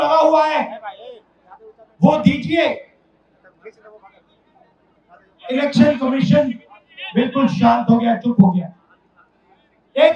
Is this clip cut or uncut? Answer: uncut